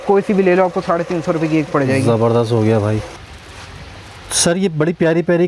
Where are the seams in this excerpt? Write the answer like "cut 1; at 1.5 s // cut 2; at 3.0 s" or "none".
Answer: none